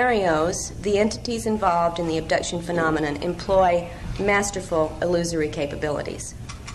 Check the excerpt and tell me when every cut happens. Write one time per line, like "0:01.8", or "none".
none